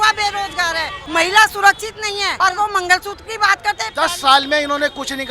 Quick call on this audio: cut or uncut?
cut